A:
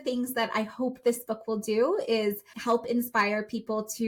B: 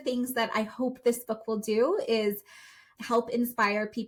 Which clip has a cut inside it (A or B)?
A